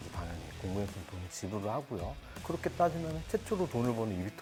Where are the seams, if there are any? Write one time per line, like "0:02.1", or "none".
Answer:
none